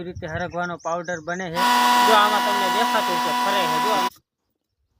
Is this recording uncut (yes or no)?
no